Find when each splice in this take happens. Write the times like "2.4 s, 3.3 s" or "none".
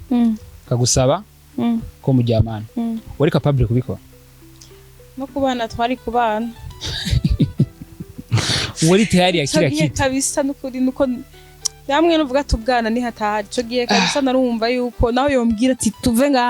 none